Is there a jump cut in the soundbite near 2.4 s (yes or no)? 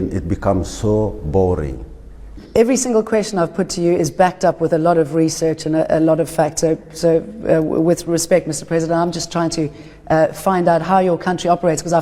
yes